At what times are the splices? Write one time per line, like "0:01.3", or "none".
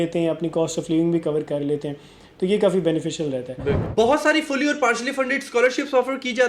0:03.8